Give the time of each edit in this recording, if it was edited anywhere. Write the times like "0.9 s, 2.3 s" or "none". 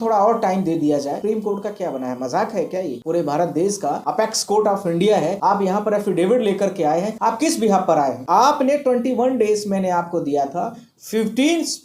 1.2 s, 3.0 s, 4.0 s, 5.4 s, 7.1 s, 8.2 s